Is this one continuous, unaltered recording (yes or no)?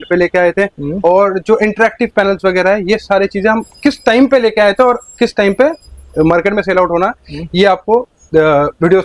yes